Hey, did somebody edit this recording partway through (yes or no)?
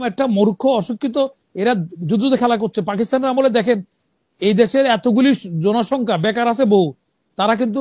no